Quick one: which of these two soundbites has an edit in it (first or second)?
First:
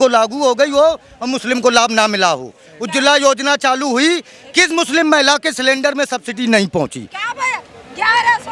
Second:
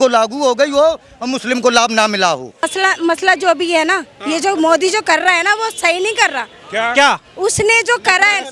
second